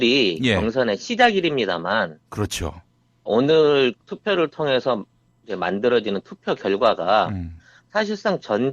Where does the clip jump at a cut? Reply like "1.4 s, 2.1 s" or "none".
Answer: 5.1 s